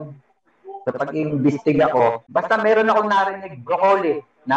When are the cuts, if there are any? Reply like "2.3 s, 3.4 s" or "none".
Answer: 2.2 s